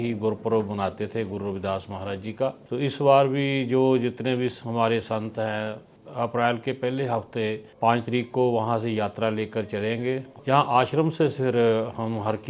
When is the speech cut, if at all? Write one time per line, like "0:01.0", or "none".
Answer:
0:02.6
0:05.9
0:07.7
0:10.3